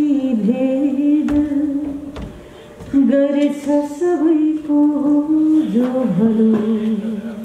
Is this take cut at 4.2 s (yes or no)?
no